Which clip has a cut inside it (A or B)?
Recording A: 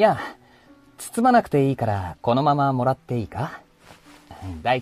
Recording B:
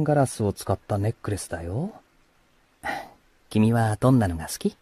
B